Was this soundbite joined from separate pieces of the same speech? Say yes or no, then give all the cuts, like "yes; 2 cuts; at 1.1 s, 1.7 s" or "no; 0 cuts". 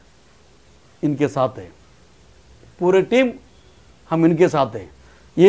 no; 0 cuts